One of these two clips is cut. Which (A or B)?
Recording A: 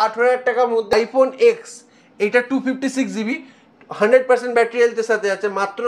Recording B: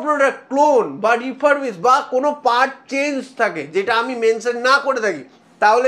A